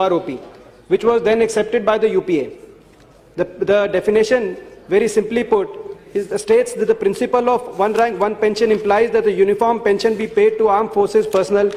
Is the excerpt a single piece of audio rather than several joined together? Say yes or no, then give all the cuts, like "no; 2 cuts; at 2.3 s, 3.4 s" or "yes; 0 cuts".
yes; 0 cuts